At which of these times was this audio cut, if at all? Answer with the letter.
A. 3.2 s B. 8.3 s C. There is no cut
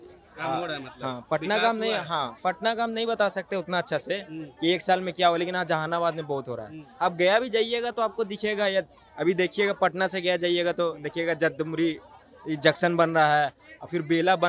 C